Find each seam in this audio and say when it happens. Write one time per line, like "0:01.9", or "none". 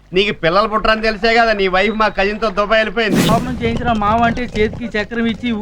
0:03.2